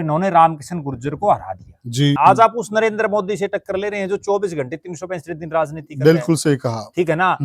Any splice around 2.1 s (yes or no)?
yes